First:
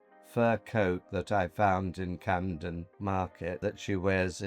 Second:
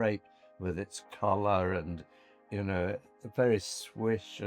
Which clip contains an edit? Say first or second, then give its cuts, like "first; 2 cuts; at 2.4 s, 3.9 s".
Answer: first; 2 cuts; at 2.9 s, 3.6 s